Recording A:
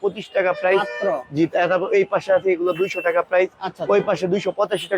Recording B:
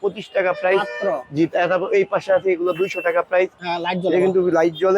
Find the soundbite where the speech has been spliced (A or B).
B